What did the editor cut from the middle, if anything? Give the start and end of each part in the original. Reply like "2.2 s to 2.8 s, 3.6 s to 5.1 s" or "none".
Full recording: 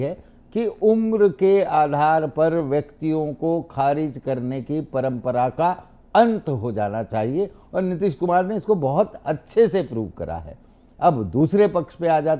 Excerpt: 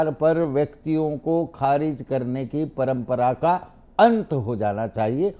none

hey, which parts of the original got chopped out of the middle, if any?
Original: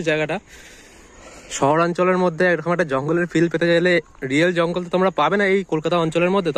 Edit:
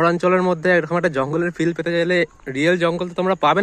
none

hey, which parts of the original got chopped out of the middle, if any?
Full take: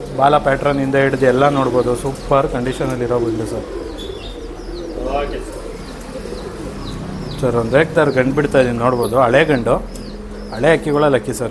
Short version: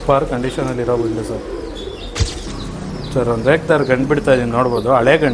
4.7 s to 6.7 s

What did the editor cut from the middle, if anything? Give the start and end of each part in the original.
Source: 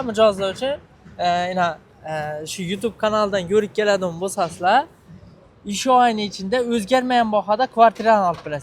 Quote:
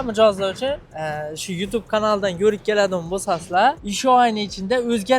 0.9 s to 2.0 s, 5.0 s to 5.7 s

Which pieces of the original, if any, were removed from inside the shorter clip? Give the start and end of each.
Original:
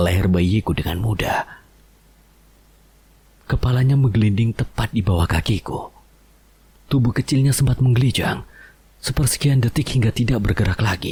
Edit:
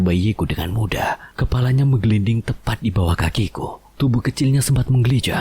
1.5 s to 3.4 s, 5.9 s to 6.7 s

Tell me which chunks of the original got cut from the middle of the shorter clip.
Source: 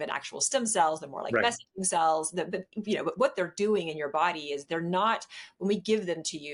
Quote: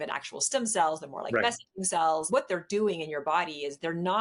2.3 s to 3.1 s

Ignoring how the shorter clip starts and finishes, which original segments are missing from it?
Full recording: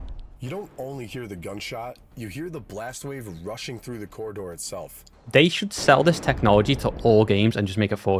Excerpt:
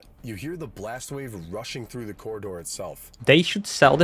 5.0 s to 5.1 s

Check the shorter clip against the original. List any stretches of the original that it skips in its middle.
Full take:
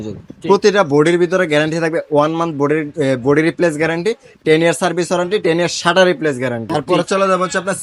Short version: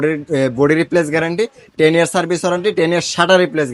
none

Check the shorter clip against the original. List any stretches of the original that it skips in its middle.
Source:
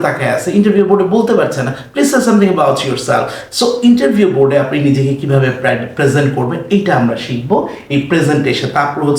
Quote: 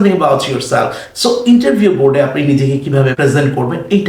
5.5 s to 5.9 s

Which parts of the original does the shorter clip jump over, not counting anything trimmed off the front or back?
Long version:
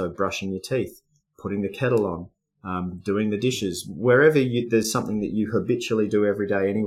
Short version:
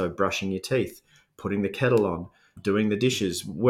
2.5 s to 2.9 s

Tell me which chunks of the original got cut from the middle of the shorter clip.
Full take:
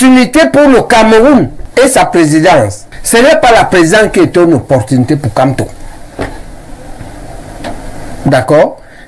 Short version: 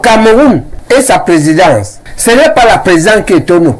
none

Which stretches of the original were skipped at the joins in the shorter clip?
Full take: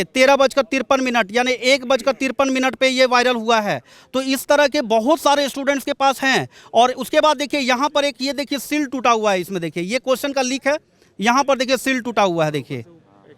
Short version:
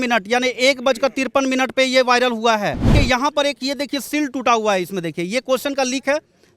3.9 s to 7.5 s

